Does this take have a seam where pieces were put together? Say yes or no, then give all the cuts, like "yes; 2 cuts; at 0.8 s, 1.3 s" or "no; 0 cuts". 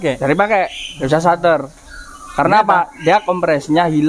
no; 0 cuts